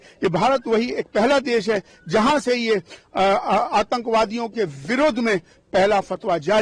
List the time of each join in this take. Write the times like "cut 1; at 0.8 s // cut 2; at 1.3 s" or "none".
none